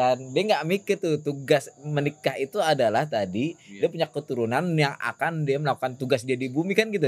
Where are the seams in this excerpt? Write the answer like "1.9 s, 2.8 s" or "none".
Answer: none